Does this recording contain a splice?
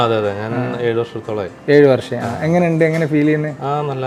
no; 0 cuts

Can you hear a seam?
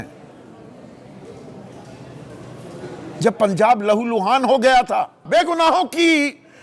yes; 1 cut; at 5.2 s

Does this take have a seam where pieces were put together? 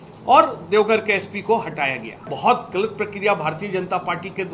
yes; 1 cut; at 2.3 s

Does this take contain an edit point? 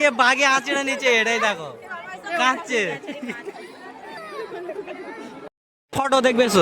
no; 0 cuts

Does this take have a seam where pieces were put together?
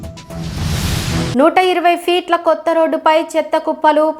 yes; 1 cut; at 1.3 s

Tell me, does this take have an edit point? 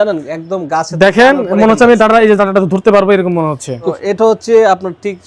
yes; 1 cut; at 3.9 s

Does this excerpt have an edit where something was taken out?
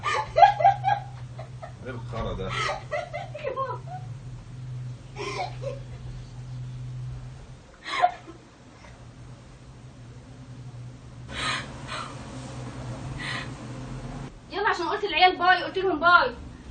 yes; 1 cut; at 14.2 s

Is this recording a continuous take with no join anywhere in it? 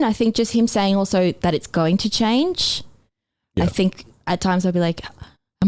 yes; 0 cuts

